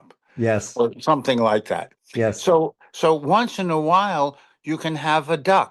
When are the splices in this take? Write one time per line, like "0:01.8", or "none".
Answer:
none